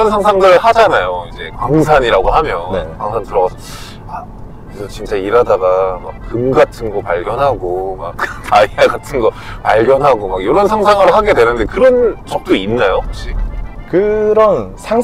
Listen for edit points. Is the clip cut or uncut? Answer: uncut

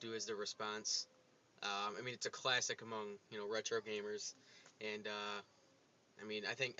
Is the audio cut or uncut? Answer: cut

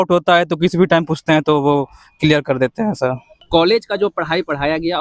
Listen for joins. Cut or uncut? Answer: cut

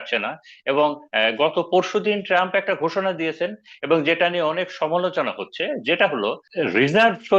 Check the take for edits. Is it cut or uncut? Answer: cut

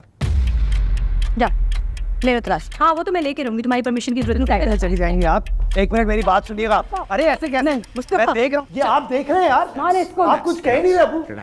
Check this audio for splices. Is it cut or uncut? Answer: uncut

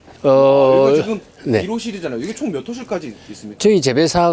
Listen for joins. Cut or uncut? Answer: uncut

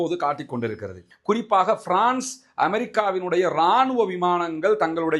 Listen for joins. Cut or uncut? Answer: cut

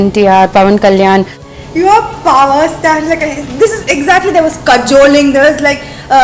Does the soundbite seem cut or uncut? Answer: cut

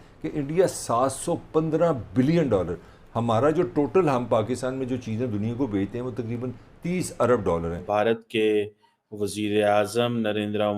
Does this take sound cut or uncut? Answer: cut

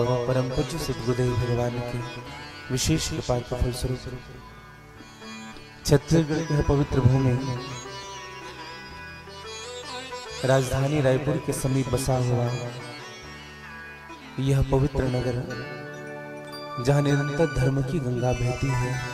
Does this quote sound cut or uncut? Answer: uncut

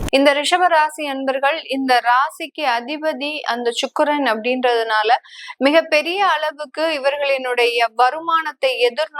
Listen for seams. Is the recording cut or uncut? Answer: uncut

